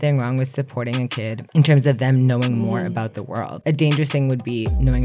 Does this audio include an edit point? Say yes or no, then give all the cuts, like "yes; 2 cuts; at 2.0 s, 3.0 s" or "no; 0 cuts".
no; 0 cuts